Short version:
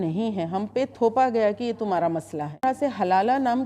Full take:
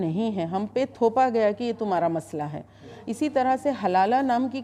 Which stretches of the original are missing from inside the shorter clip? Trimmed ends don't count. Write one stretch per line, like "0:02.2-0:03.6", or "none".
0:02.6-0:03.5

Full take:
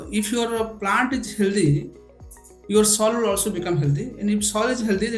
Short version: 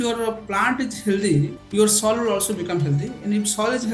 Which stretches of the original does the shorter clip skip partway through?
0:01.9-0:02.6

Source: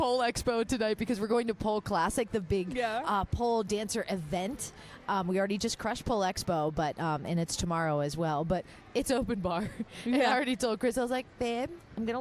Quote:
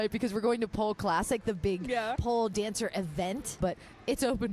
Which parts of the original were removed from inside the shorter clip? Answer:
0:03.0-0:03.3
0:04.7-0:08.5

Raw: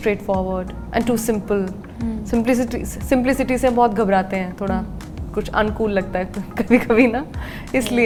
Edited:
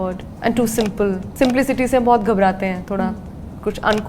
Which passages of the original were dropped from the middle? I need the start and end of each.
0:01.8-0:03.0

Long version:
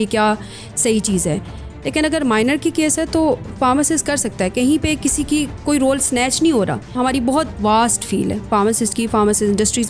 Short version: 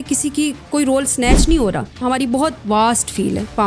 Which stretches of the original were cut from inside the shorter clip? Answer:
none

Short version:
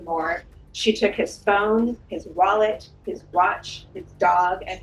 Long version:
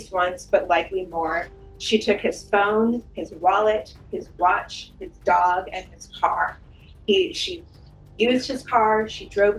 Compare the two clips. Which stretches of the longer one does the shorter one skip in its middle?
none

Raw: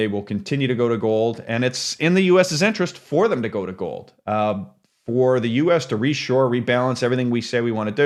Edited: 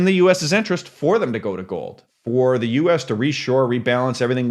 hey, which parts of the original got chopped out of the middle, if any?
0:04.1-0:04.8

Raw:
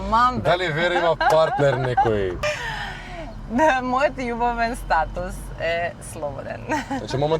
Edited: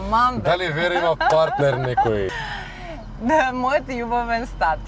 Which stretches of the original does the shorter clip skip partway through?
0:02.3-0:02.6

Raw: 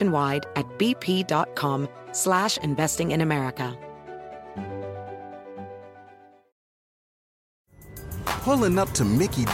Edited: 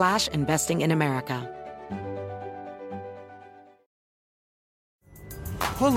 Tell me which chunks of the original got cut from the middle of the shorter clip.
0:03.7-0:04.1

